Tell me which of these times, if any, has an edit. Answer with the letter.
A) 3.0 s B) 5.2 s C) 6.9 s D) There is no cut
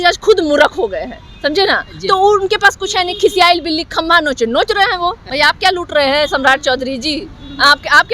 B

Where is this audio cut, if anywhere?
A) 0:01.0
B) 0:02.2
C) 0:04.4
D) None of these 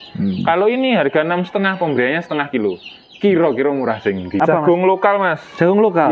C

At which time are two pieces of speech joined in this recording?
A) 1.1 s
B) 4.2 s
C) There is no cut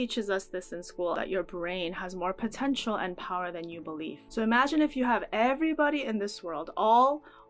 B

